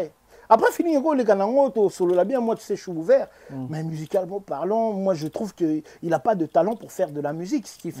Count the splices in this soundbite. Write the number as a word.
zero